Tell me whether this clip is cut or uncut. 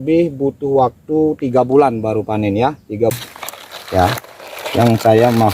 cut